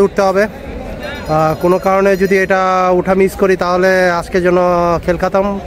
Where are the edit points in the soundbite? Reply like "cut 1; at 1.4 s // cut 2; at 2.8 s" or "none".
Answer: none